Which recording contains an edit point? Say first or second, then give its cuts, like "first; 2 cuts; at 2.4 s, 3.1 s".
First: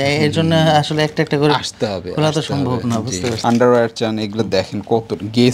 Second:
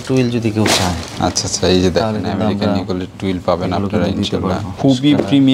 first; 1 cut; at 3.4 s